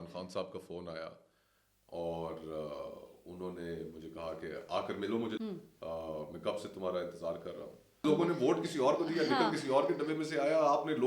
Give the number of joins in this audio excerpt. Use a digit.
2